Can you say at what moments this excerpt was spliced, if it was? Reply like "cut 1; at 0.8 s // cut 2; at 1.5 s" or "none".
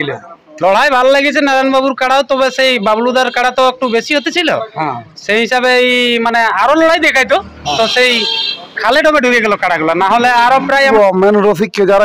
cut 1; at 10.9 s